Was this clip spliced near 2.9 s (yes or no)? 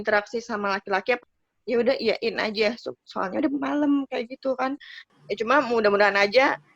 no